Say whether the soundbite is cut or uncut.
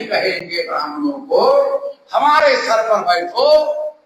uncut